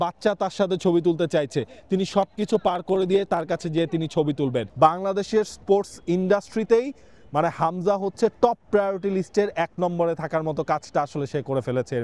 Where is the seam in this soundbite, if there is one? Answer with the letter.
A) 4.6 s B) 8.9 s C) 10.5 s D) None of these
A